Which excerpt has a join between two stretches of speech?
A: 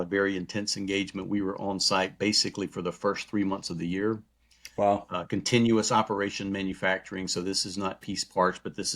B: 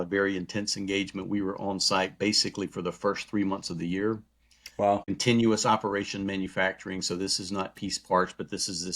B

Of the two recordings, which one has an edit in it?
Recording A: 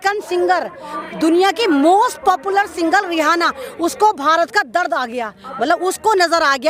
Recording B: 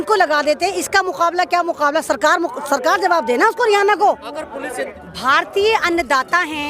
B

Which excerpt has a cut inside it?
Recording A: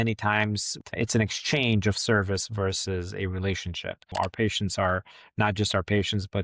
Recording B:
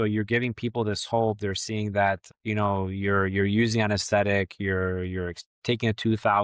A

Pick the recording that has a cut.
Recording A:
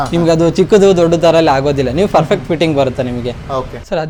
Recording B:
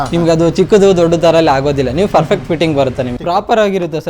B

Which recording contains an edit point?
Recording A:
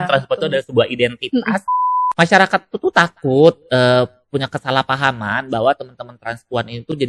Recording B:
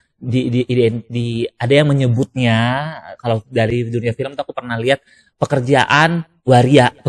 A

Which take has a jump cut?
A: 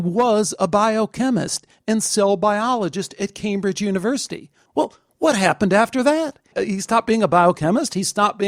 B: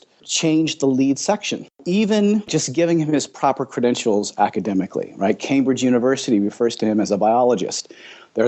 B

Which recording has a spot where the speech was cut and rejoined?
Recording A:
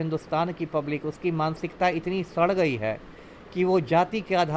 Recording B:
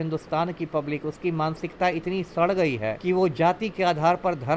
B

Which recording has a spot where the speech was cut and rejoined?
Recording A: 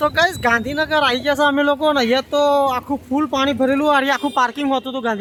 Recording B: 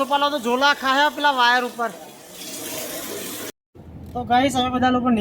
B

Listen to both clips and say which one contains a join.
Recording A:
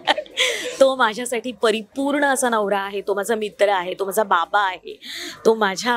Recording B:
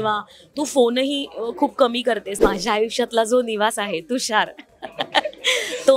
B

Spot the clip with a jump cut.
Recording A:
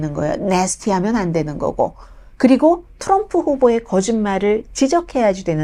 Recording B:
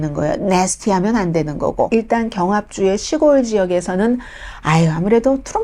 B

